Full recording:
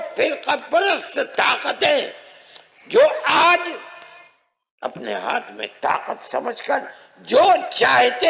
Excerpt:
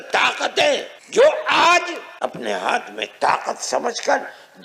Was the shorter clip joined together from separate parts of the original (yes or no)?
yes